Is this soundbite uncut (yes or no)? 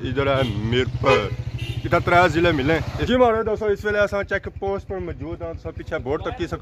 yes